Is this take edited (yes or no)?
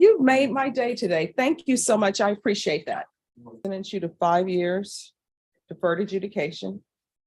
yes